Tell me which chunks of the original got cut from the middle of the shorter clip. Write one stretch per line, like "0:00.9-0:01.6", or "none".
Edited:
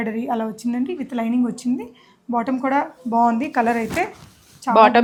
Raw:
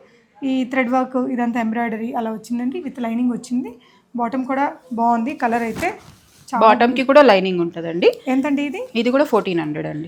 none